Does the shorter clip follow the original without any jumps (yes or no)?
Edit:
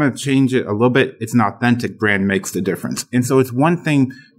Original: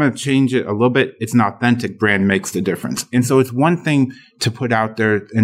yes